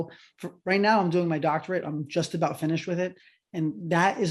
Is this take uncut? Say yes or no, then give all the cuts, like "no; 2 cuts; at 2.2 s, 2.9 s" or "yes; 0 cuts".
yes; 0 cuts